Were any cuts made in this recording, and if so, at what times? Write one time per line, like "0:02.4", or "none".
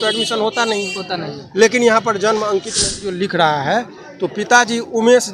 0:03.0

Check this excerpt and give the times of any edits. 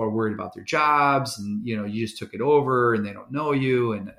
none

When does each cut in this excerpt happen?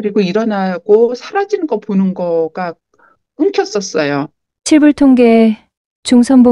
0:04.5

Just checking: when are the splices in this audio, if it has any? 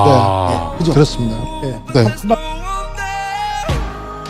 0:02.3

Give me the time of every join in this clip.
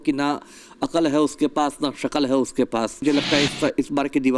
0:03.0

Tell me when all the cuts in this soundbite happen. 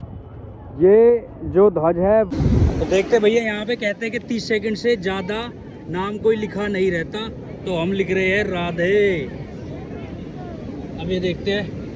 0:02.3

